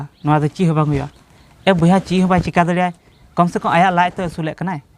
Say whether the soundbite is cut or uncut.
uncut